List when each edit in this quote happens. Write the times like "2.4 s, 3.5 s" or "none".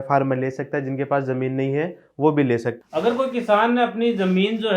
2.8 s